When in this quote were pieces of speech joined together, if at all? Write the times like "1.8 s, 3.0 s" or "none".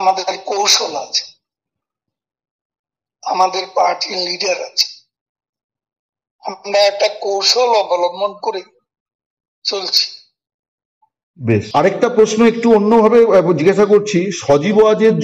11.7 s